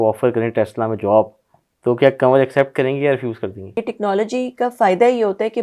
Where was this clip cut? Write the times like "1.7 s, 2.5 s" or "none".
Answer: 3.8 s